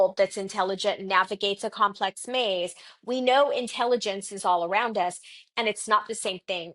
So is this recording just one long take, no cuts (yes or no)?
yes